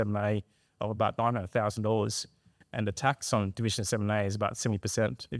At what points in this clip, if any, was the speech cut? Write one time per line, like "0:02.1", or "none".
0:02.6